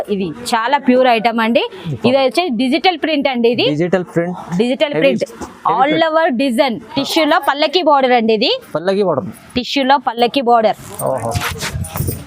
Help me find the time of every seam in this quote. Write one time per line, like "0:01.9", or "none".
0:06.9

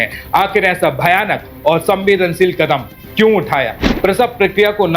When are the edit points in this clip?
0:03.9

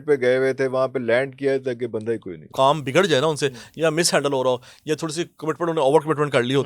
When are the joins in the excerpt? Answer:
0:02.5

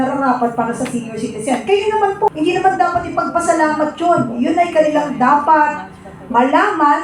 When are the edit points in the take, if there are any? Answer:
0:02.3

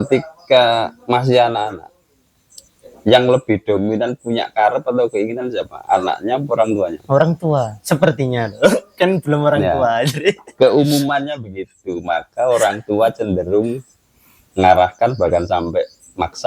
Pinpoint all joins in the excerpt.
none

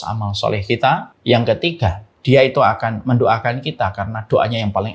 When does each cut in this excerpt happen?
0:01.1
0:02.1

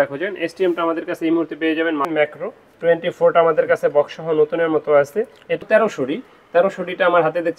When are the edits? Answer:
0:02.1
0:05.6

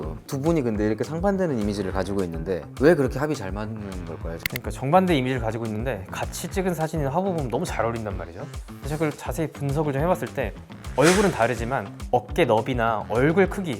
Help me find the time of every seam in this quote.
0:02.7
0:04.4

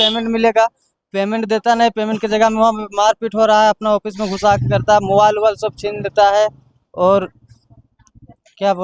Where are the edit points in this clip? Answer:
none

